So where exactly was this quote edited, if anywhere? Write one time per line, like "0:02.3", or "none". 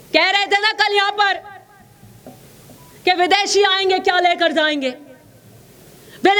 none